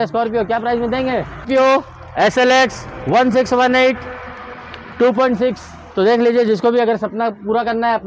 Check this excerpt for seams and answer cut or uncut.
cut